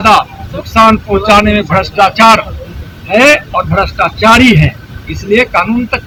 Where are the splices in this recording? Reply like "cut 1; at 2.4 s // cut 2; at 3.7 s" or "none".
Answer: none